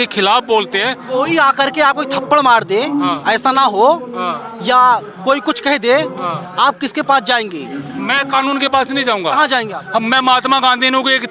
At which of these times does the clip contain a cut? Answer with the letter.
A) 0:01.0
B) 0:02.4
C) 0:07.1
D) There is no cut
A